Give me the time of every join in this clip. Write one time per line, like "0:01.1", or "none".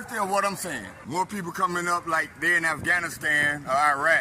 0:00.9